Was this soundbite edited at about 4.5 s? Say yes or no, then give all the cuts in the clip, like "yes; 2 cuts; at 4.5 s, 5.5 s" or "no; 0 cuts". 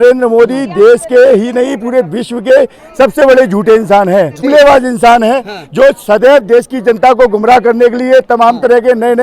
yes; 1 cut; at 4.5 s